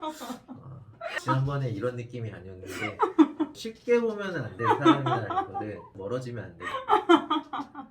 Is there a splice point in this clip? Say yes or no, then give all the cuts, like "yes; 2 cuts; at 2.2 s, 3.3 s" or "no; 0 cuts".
yes; 1 cut; at 1.2 s